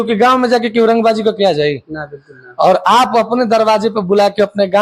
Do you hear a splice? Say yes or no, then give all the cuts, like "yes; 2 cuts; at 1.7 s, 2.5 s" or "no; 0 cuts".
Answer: no; 0 cuts